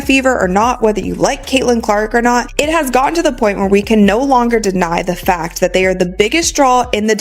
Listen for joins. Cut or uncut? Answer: uncut